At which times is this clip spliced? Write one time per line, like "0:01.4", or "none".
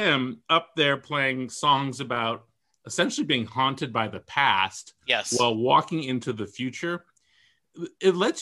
none